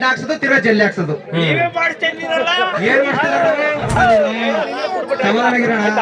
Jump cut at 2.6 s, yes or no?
no